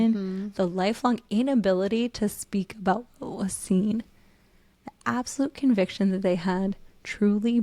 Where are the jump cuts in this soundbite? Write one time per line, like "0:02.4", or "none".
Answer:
none